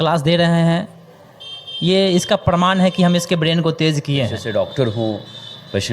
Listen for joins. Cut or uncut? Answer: cut